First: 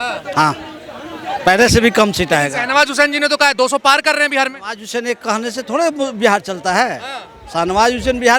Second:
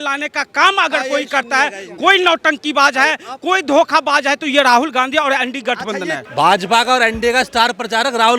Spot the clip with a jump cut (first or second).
second